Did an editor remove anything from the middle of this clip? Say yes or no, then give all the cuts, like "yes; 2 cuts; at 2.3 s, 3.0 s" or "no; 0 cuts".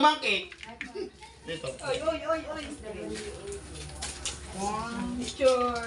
no; 0 cuts